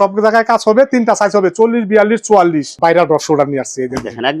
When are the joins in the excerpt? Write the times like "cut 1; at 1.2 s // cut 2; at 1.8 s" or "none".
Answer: cut 1; at 2.7 s